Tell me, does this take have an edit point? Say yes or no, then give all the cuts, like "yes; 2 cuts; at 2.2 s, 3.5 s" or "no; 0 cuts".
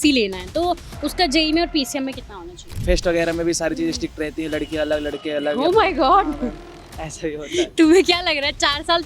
yes; 1 cut; at 2.8 s